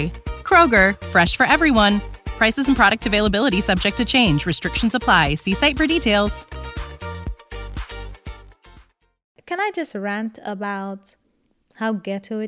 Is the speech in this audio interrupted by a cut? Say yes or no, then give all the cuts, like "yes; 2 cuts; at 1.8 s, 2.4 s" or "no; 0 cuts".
yes; 1 cut; at 9.3 s